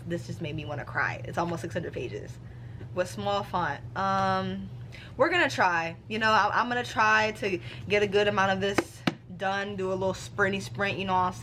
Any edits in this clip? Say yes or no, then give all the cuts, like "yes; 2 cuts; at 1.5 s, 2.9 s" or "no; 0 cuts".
no; 0 cuts